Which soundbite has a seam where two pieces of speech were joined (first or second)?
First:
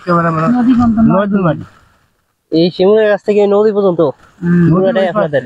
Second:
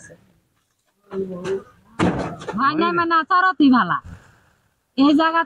second